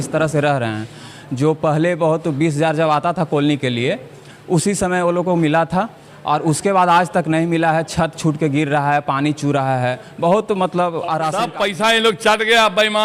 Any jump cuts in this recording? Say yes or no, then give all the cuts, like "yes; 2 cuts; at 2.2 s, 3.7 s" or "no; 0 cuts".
yes; 1 cut; at 11.4 s